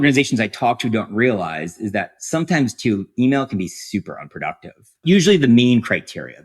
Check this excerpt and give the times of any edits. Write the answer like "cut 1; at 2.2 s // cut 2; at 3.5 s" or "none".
cut 1; at 5.0 s